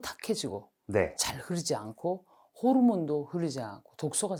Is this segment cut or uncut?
uncut